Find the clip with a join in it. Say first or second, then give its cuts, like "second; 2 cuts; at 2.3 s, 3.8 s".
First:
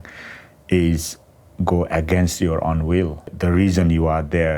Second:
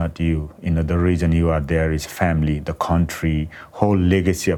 first; 1 cut; at 3.3 s